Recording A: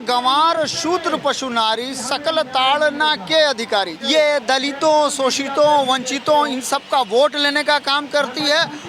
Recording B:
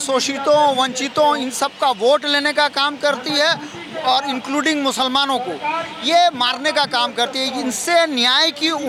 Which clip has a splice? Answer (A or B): A